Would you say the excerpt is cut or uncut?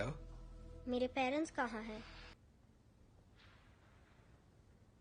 cut